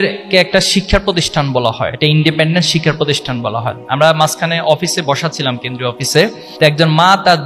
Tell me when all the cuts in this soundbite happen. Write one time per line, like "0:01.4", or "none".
0:01.9
0:06.4